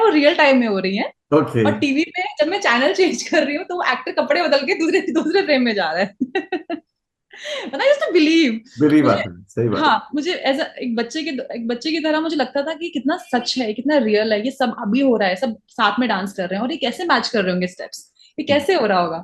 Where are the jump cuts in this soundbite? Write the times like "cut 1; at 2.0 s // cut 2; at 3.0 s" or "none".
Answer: none